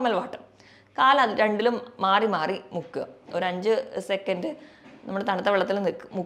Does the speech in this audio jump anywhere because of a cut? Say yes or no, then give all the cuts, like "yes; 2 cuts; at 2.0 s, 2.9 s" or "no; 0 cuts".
no; 0 cuts